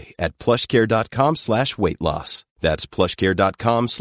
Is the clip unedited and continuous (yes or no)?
yes